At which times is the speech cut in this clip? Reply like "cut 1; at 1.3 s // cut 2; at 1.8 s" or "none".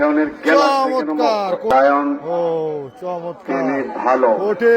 cut 1; at 1.7 s